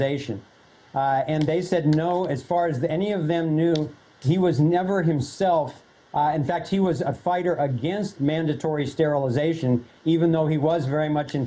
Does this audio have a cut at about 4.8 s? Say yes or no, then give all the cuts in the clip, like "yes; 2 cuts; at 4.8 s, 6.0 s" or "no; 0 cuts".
yes; 1 cut; at 4.8 s